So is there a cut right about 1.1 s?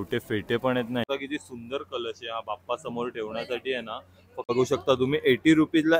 yes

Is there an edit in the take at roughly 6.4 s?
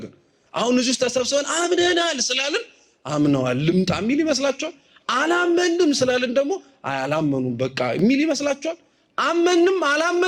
no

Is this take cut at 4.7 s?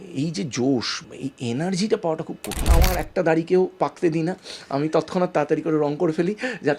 no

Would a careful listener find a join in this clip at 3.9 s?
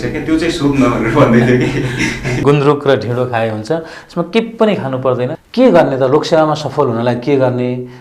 no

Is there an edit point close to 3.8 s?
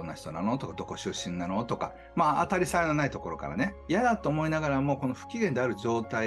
yes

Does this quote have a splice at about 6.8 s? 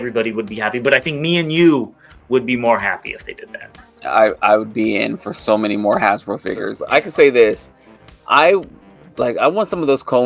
yes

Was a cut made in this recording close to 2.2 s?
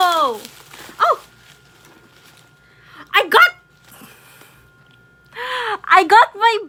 no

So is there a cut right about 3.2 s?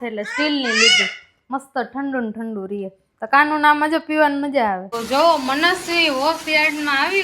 no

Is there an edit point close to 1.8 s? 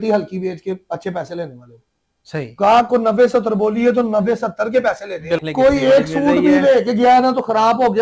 no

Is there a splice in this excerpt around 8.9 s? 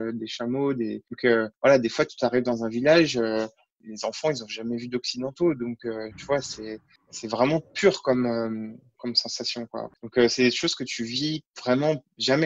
yes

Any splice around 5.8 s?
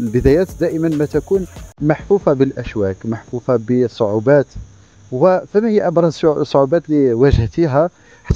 no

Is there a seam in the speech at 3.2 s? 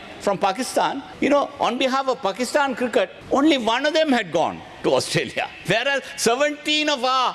yes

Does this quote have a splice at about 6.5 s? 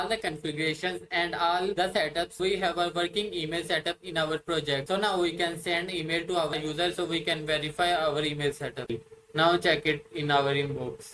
yes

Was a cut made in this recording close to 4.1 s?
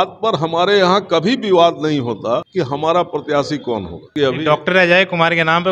yes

